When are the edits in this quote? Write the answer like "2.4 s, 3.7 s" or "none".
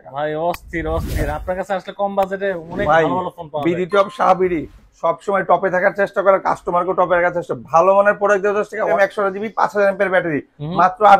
8.9 s